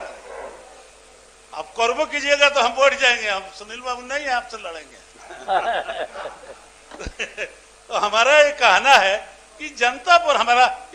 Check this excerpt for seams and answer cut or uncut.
uncut